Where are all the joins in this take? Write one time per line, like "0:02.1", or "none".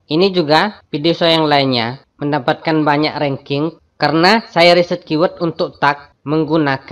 0:03.8